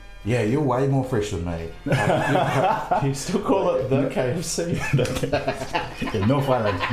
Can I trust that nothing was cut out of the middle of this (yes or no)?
yes